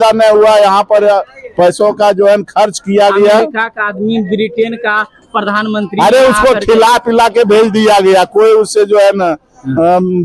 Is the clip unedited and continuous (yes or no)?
yes